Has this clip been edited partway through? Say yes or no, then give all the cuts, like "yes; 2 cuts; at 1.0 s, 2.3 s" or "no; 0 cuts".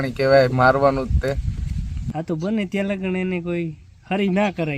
yes; 1 cut; at 2.0 s